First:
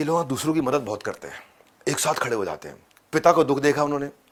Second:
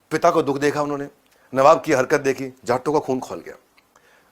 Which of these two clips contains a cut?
second; 1 cut; at 2.6 s

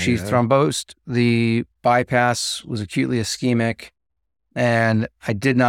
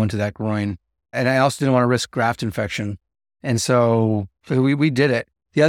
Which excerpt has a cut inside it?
second; 3 cuts; at 1.2 s, 2.1 s, 4.3 s

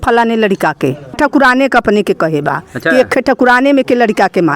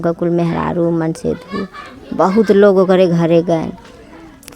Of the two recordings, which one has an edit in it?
first; 1 cut; at 1.1 s

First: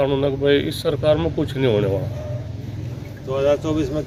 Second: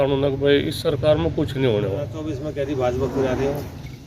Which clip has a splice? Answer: second; 1 cut; at 2.3 s

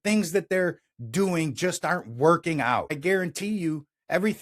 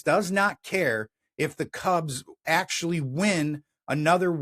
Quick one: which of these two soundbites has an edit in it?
first; 1 cut; at 3.0 s

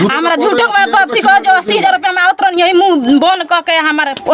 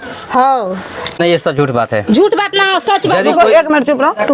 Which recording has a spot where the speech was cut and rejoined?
second; 1 cut; at 1.2 s

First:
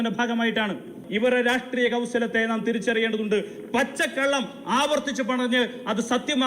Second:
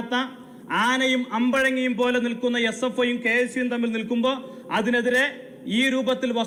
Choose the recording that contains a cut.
first; 1 cut; at 1.0 s

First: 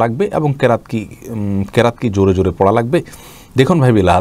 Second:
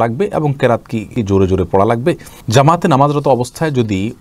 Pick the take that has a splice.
second; 2 cuts; at 1.1 s, 2.3 s

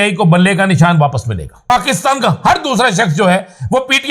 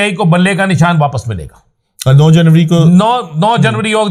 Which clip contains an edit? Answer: first; 1 cut; at 1.5 s

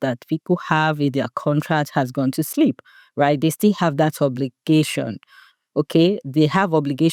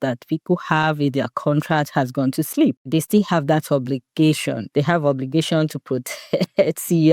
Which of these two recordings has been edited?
second; 2 cuts; at 2.9 s, 4.6 s

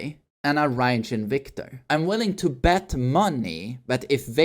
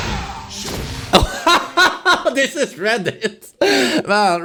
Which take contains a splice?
first; 1 cut; at 1.8 s

